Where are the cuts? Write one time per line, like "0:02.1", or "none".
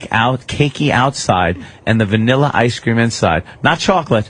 none